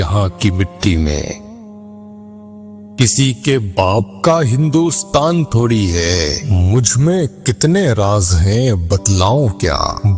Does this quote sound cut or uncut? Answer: uncut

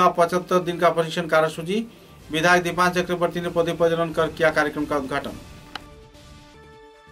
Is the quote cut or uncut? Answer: uncut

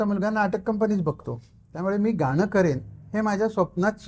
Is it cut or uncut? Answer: uncut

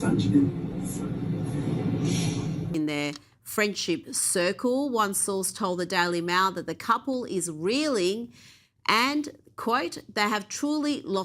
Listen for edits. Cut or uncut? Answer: cut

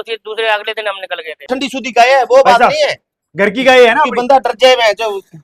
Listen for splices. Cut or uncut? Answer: cut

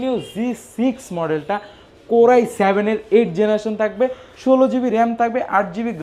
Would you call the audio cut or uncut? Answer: uncut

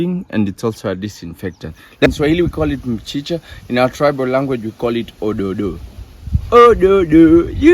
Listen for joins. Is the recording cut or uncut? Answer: cut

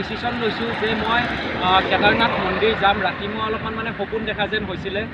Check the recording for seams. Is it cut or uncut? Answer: uncut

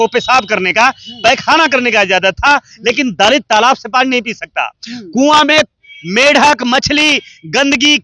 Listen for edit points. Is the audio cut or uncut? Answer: uncut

